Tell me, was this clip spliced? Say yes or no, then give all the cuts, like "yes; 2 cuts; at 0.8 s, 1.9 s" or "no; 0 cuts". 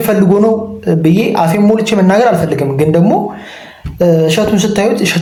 no; 0 cuts